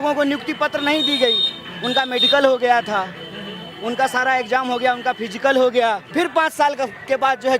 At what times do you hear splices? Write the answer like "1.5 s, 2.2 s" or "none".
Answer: 6.0 s